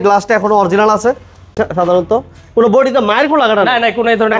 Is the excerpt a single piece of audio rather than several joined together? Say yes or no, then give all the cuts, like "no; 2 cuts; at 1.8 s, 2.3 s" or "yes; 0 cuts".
no; 1 cut; at 1.6 s